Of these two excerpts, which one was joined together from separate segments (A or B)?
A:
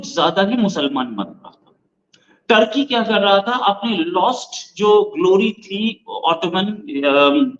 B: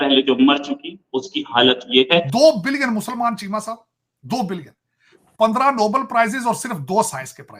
B